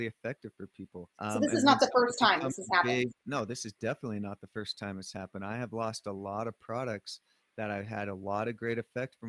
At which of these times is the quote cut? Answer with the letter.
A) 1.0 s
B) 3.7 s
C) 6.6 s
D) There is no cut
A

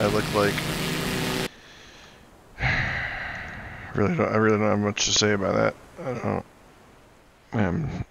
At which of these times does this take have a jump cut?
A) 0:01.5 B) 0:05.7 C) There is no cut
A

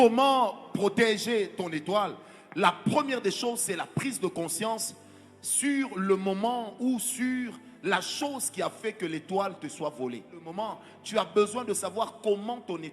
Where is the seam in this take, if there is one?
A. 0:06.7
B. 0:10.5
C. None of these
B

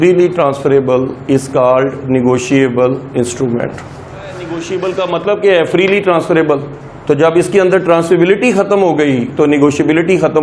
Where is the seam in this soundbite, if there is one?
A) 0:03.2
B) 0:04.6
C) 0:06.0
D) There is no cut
B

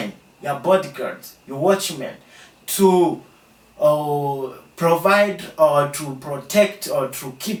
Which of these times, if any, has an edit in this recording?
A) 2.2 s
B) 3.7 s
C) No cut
C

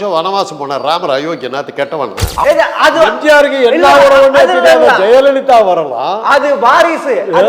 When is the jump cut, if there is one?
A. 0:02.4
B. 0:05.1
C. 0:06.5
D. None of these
A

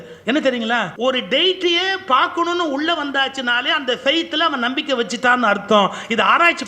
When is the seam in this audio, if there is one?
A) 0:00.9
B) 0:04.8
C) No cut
A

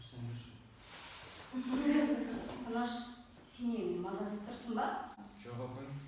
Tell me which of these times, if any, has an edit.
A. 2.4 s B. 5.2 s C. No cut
B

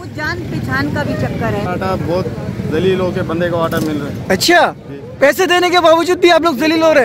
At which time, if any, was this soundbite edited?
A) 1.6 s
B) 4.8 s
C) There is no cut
A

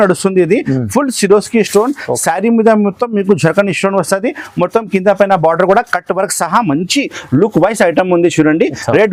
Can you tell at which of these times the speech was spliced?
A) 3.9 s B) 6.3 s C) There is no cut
C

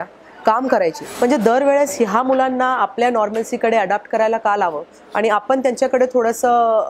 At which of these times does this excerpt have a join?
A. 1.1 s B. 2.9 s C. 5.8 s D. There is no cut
A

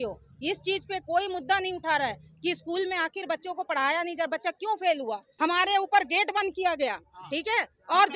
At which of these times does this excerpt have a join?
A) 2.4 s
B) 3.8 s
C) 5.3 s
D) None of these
C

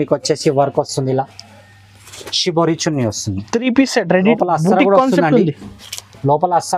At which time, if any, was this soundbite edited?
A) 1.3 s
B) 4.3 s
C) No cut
B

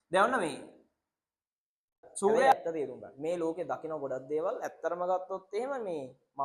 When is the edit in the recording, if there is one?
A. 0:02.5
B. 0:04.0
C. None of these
A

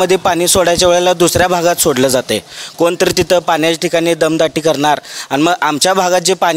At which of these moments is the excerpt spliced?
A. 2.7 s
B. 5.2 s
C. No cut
C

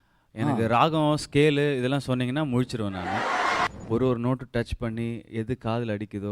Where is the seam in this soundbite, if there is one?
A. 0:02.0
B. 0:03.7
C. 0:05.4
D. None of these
B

